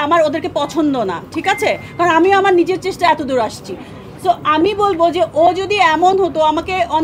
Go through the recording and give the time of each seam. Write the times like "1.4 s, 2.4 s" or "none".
none